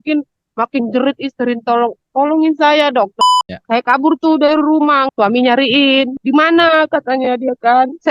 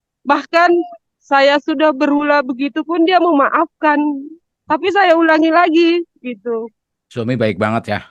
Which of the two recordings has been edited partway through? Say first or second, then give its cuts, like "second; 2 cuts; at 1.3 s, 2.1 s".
first; 3 cuts; at 3.1 s, 5.1 s, 6.2 s